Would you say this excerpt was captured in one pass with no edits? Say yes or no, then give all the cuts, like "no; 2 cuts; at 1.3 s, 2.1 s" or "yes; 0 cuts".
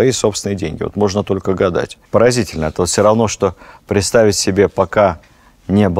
yes; 0 cuts